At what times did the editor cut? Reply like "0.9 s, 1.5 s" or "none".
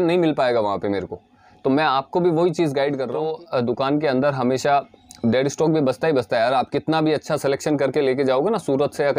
3.2 s